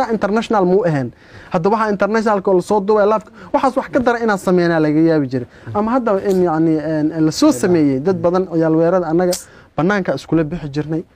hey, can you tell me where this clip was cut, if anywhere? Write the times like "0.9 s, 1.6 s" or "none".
none